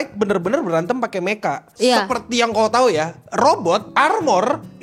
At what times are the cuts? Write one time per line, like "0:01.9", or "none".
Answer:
0:01.7
0:03.9

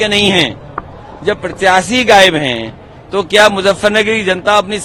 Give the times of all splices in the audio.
none

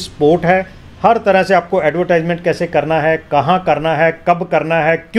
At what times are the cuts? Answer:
none

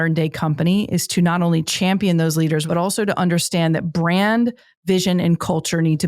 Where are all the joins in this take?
0:02.6

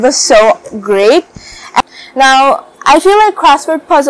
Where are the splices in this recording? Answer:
0:01.8

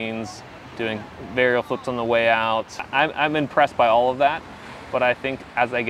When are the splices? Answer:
0:02.8

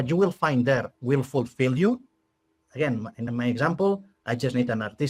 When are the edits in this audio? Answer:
0:03.3

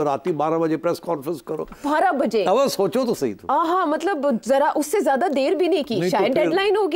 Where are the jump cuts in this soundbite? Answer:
none

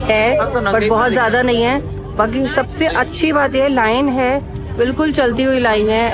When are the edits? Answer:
none

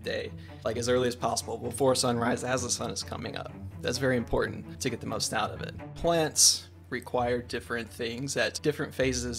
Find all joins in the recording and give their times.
0:04.7
0:05.9
0:08.6

